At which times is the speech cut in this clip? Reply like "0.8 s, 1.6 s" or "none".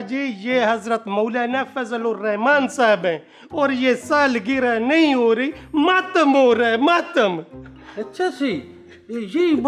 none